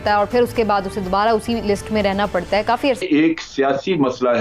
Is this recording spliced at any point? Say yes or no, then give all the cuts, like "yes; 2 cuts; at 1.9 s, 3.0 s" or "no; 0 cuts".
yes; 1 cut; at 3.0 s